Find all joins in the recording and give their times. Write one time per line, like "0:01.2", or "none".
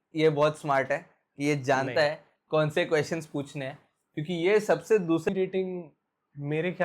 0:05.3